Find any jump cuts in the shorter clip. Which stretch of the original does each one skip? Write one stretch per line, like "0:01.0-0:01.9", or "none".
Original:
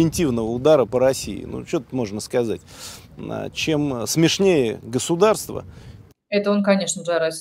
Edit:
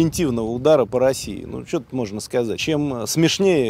0:02.6-0:03.6